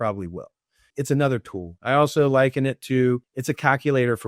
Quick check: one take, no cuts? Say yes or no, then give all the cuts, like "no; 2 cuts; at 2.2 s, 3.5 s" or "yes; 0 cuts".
no; 2 cuts; at 0.8 s, 3.3 s